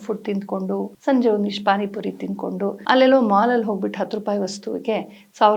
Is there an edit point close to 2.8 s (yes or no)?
yes